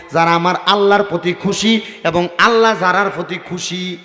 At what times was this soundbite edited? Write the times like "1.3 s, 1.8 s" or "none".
none